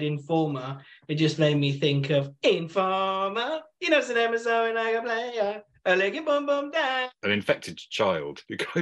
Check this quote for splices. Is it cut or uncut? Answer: cut